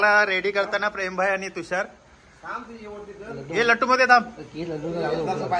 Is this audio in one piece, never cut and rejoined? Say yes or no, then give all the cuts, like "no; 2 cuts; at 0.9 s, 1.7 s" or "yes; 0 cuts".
yes; 0 cuts